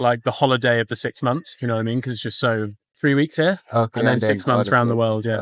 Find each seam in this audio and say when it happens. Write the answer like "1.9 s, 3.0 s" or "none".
2.8 s